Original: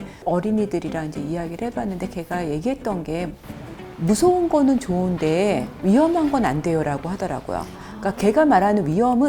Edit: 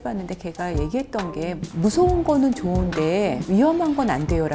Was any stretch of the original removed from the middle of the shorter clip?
yes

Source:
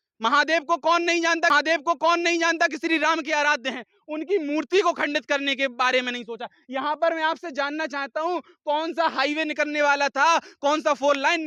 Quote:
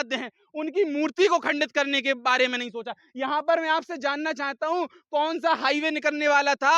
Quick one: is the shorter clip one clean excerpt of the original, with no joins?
yes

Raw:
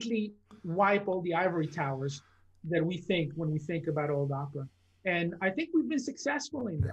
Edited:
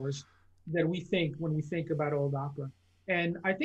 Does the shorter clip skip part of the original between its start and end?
no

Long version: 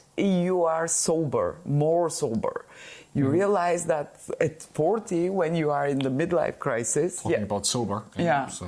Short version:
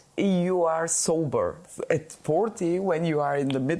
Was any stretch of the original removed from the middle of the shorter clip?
yes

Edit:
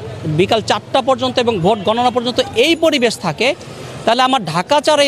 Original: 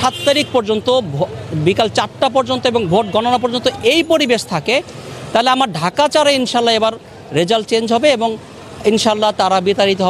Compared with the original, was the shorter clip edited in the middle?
no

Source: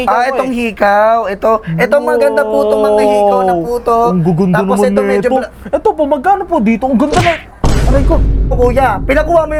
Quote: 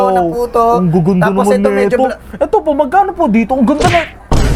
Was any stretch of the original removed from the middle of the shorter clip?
no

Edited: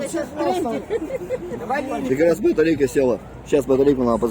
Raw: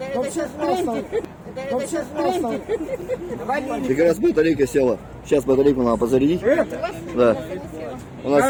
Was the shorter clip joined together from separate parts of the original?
yes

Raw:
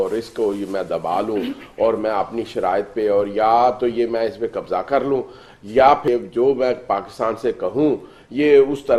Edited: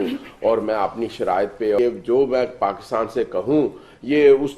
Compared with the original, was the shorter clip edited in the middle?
yes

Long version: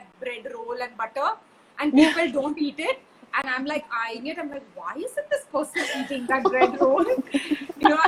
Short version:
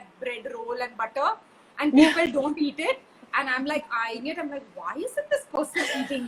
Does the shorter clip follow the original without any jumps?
yes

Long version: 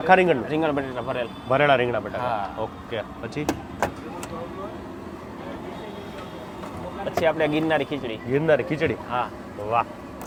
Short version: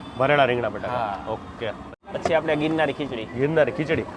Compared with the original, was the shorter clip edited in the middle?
yes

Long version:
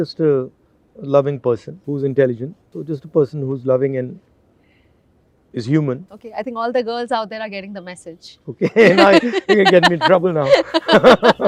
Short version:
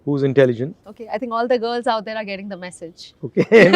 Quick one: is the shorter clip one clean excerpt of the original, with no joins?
no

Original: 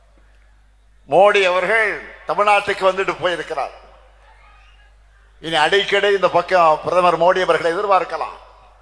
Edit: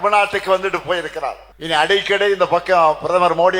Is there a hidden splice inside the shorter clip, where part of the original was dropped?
yes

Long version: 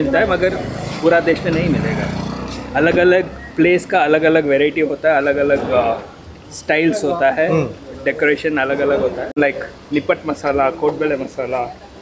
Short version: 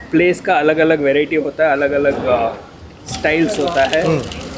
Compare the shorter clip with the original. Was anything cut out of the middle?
no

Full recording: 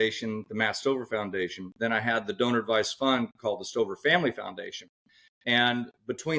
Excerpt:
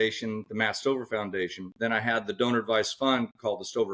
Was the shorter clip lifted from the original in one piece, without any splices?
yes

